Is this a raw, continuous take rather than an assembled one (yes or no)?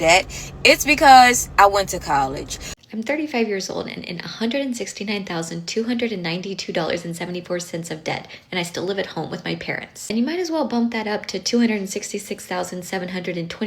no